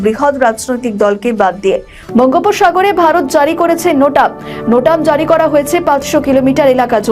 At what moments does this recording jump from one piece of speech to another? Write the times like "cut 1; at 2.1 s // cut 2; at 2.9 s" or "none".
cut 1; at 1.9 s